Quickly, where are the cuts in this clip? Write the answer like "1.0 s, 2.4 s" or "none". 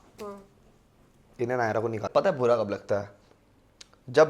2.1 s